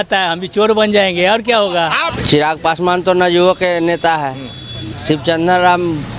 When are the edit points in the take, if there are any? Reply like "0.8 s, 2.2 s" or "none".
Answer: 2.0 s

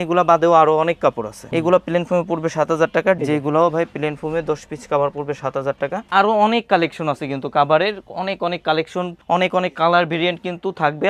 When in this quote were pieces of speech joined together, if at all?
3.2 s, 6.1 s

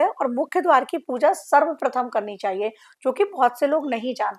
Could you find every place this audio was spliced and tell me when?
none

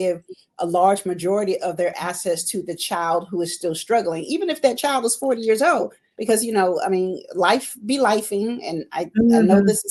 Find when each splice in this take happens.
none

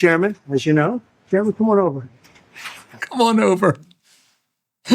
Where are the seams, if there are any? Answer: 2.9 s

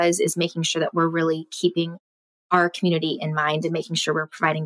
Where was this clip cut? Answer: none

